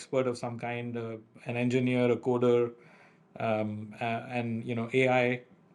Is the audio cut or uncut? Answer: uncut